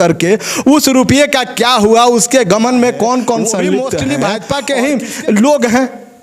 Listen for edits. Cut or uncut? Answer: cut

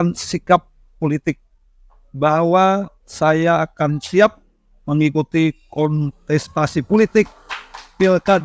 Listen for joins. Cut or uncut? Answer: uncut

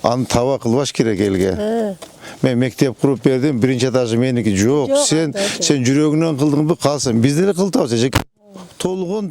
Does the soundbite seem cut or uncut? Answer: uncut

